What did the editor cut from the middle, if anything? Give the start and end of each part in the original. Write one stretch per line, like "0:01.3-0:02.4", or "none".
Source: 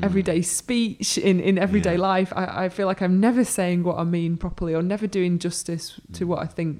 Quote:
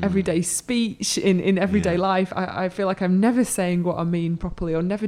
none